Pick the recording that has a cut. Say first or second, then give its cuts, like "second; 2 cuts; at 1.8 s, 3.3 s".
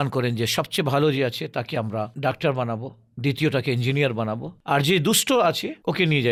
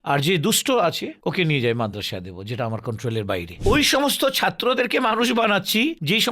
second; 1 cut; at 3.6 s